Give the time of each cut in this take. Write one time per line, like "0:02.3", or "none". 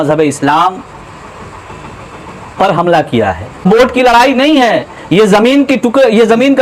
0:03.6